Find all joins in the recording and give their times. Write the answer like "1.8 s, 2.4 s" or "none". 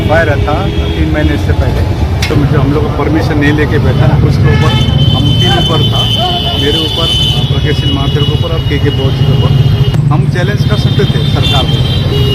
2.3 s, 9.9 s